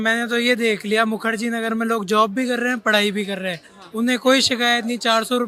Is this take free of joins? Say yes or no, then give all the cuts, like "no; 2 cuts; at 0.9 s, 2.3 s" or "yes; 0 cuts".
yes; 0 cuts